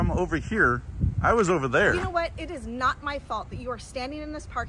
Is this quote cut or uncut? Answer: uncut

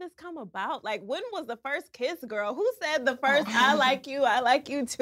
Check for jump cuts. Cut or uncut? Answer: uncut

